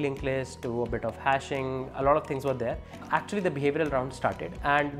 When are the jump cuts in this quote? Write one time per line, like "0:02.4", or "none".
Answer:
0:03.0